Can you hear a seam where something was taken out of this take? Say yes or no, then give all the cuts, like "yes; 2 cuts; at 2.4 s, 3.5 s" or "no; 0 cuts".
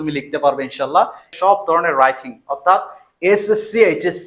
yes; 1 cut; at 1.3 s